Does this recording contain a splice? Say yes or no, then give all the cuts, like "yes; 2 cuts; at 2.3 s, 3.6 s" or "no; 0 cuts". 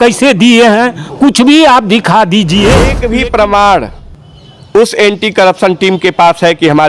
yes; 1 cut; at 3.0 s